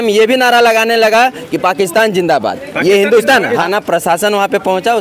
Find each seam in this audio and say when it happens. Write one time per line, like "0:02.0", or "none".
0:03.6